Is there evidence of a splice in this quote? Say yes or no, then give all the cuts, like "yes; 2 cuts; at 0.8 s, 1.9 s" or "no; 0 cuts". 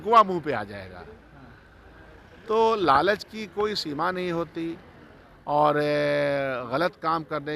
no; 0 cuts